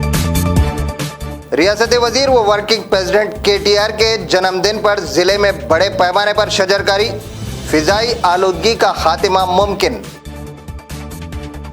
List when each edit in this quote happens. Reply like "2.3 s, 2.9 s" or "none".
1.0 s